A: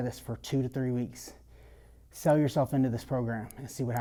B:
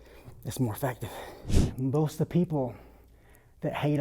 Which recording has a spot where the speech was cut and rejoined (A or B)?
B